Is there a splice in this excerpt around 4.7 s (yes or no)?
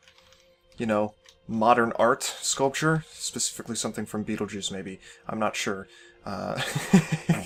no